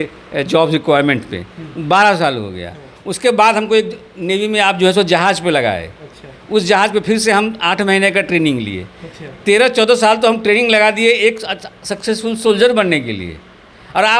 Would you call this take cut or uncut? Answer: uncut